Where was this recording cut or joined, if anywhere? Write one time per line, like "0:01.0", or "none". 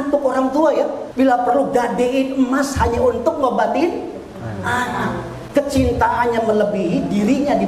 0:01.0